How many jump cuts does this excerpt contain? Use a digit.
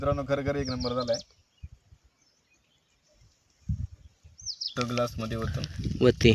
1